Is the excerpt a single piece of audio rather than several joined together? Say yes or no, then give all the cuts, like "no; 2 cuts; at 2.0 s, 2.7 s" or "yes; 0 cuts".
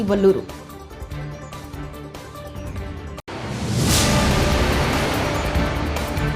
yes; 0 cuts